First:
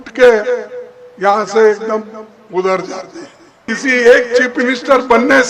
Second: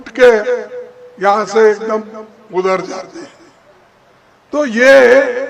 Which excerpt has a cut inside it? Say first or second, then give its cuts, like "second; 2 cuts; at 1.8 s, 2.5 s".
first; 1 cut; at 3.7 s